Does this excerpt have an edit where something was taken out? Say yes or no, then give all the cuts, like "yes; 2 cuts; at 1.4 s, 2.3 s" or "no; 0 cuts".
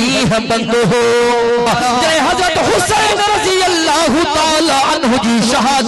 yes; 1 cut; at 1.7 s